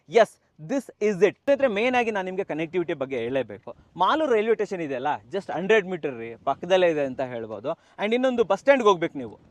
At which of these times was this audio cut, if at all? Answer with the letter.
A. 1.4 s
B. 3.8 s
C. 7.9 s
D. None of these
A